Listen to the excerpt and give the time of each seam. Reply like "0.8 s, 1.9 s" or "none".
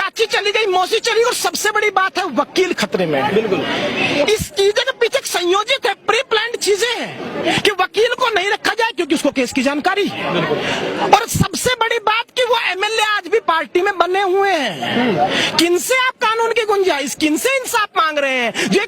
none